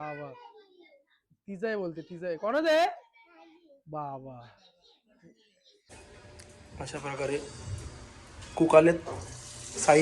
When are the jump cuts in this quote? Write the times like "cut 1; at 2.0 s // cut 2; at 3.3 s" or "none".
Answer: cut 1; at 5.9 s